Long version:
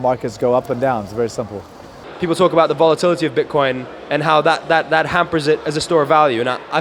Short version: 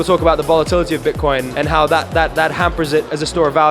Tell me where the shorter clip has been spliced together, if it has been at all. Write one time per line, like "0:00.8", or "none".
0:01.5

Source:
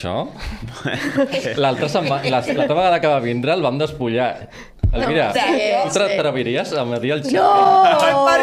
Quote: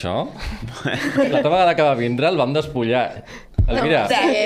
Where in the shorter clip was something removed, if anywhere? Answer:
0:01.3

